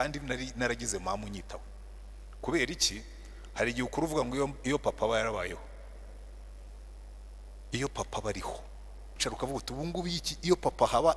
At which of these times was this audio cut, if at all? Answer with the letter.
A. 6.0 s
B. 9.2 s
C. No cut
B